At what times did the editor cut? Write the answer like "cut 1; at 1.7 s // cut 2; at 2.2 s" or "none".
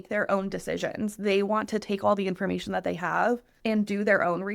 cut 1; at 3.5 s